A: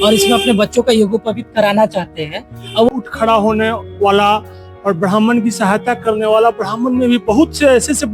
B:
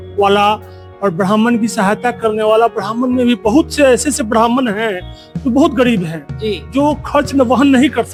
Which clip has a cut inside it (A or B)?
A